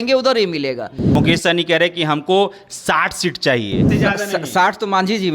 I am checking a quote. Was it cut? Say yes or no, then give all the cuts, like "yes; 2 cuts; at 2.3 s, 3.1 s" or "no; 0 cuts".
yes; 2 cuts; at 1.0 s, 3.9 s